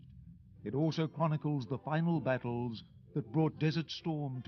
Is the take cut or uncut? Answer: uncut